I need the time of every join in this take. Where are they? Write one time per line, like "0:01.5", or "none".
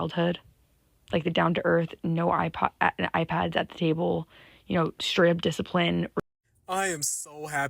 0:06.2